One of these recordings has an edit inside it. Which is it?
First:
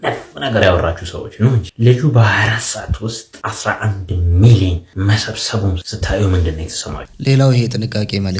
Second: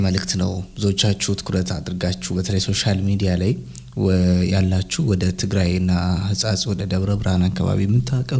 first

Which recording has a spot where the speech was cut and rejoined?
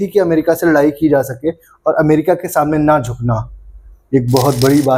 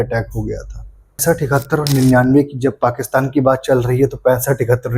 second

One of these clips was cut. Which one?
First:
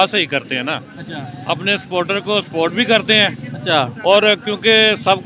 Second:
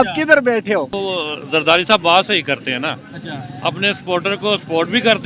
second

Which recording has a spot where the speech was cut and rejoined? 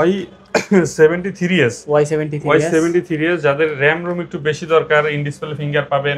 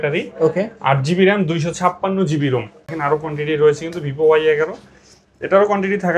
second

